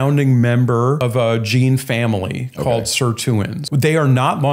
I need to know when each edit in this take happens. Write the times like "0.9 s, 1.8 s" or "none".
1.0 s, 3.6 s